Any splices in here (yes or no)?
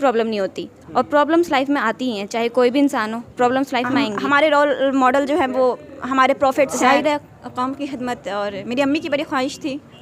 yes